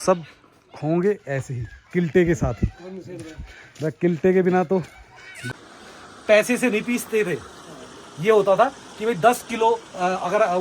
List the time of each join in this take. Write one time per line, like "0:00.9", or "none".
0:05.4